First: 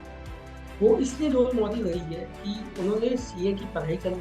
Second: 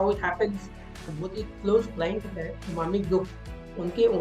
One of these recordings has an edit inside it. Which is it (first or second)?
second